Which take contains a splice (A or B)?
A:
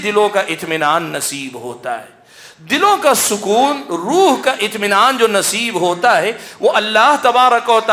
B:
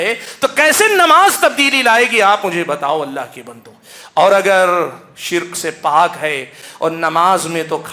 B